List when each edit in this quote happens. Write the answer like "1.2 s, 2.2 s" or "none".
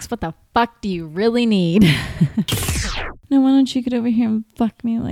2.6 s